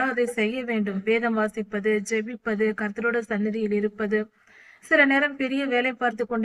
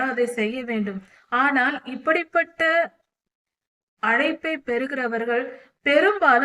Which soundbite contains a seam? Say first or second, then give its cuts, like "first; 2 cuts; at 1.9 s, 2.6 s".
second; 1 cut; at 1.0 s